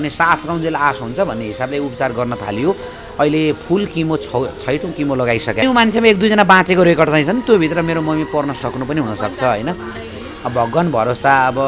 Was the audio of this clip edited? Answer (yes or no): yes